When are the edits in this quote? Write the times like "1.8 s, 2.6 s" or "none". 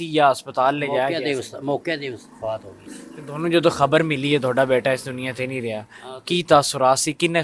none

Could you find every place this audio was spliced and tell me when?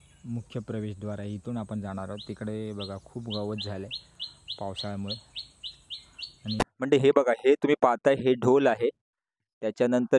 6.6 s

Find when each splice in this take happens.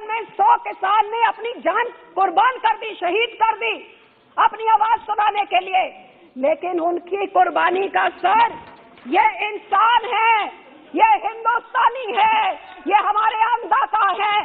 none

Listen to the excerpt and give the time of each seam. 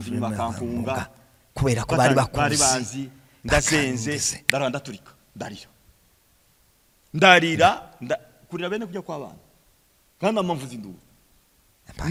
none

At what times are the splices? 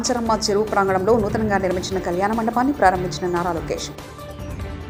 none

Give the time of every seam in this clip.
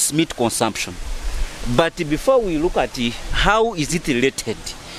none

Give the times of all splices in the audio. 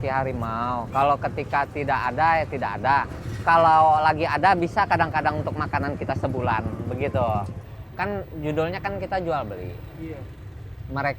7.5 s

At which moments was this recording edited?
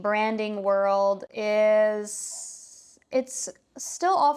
none

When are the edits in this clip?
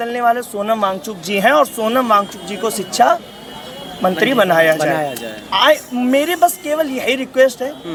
none

